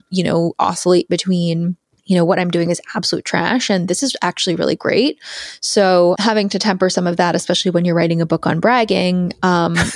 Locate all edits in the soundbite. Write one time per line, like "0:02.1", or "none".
0:01.9
0:06.2